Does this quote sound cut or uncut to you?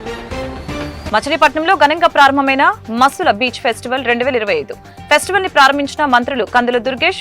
cut